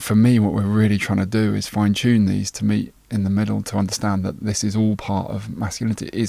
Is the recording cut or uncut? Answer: uncut